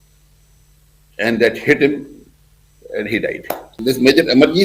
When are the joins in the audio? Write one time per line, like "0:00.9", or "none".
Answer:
0:03.7